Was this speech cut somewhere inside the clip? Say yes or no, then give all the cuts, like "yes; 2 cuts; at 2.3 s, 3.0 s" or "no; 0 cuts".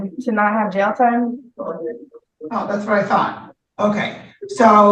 no; 0 cuts